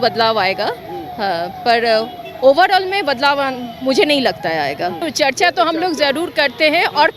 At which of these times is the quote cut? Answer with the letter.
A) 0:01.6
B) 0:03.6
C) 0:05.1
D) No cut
C